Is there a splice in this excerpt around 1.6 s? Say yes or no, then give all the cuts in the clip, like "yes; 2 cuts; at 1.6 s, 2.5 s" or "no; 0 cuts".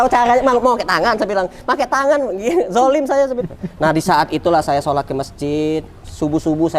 no; 1 cut; at 3.4 s